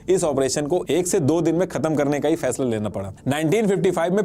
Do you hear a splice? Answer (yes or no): yes